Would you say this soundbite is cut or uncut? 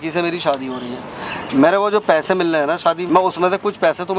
cut